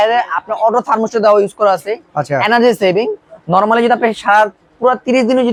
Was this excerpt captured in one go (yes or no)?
yes